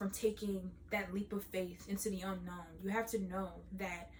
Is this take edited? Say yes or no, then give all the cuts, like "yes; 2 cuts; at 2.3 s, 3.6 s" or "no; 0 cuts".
no; 0 cuts